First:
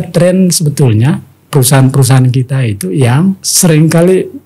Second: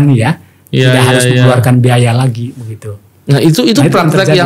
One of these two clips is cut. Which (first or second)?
first